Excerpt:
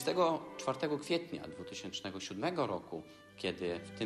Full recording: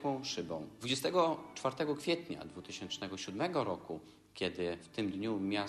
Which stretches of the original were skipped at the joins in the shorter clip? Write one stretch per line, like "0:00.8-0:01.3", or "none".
none